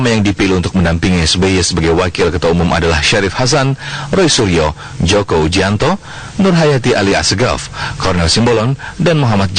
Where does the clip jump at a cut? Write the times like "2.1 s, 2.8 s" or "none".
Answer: 8.1 s